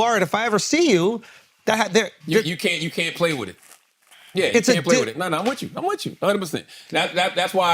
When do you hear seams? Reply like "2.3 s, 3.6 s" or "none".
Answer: none